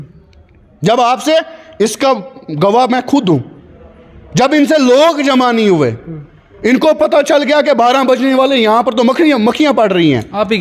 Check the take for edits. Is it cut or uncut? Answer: uncut